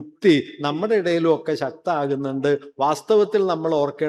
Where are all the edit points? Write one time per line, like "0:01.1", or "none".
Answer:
none

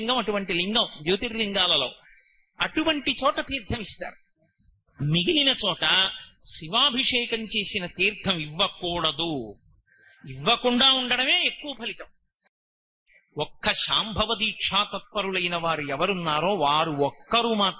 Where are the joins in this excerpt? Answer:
0:12.8

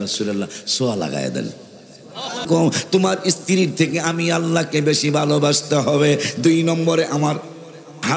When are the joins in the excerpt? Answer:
0:02.5

